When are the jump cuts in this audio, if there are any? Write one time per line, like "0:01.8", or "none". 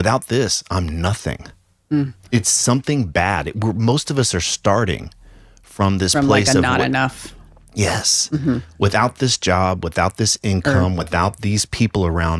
0:02.2